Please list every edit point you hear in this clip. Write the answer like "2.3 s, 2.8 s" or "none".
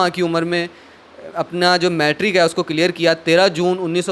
none